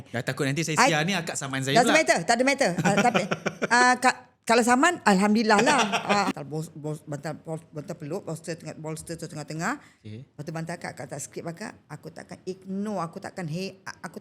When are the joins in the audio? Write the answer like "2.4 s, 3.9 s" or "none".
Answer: 6.3 s